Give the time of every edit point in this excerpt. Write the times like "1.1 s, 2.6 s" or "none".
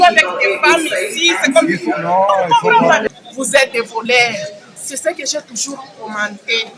3.0 s